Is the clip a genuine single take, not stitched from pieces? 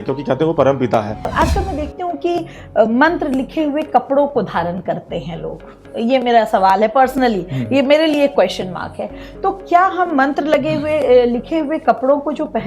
no; 1 cut; at 1.3 s

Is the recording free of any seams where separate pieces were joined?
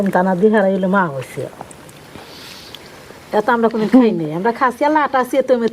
yes; 0 cuts

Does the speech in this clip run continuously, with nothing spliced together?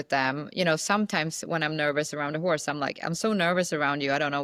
yes; 0 cuts

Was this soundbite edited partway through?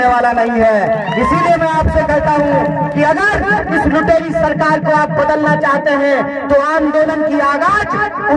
no; 0 cuts

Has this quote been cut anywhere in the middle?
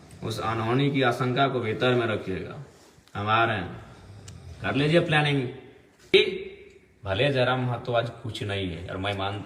yes; 1 cut; at 6.1 s

